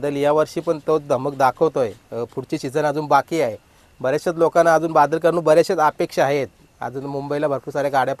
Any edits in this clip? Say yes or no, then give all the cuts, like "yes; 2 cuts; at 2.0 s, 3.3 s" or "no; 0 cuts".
no; 0 cuts